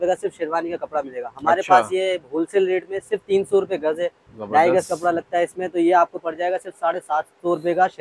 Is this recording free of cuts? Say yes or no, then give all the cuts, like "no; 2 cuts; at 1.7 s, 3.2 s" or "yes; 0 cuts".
yes; 0 cuts